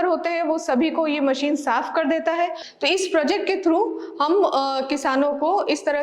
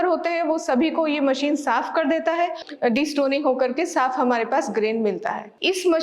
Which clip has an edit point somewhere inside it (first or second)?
first